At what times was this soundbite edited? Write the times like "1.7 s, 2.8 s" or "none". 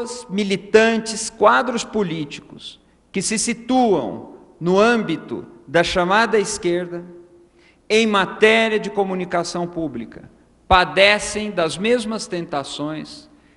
none